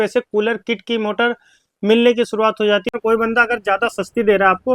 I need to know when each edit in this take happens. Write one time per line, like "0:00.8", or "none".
0:02.9